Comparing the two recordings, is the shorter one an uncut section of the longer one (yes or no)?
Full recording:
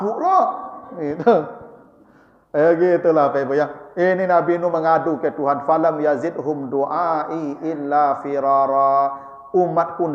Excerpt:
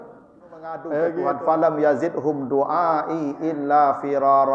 no